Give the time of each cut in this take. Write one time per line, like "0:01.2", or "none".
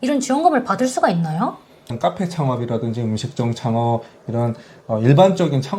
0:01.8